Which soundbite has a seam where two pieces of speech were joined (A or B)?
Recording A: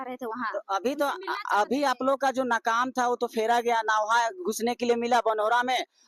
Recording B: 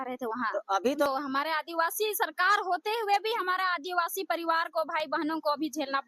B